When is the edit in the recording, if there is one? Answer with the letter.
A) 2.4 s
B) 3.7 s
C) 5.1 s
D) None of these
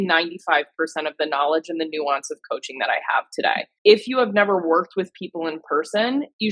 B